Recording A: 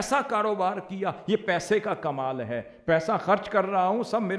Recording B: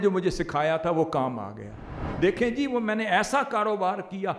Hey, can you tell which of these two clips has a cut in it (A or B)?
B